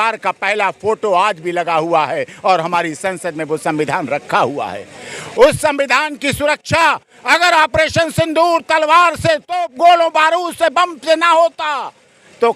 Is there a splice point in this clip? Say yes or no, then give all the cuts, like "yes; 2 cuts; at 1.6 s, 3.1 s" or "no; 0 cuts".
no; 0 cuts